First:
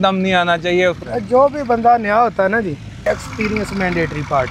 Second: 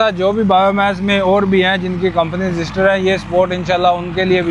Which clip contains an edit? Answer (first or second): first